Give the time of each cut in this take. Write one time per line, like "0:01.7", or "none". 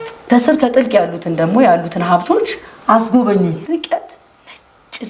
0:03.6